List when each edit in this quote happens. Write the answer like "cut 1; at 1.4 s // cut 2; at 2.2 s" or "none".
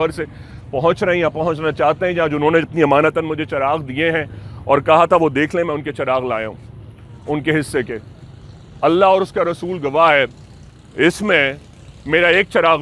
none